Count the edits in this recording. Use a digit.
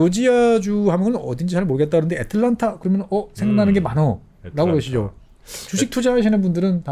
0